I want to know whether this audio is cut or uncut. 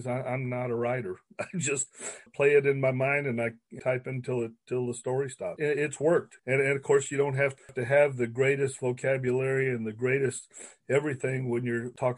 cut